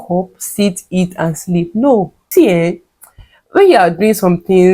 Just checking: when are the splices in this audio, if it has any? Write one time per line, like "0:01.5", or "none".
0:02.2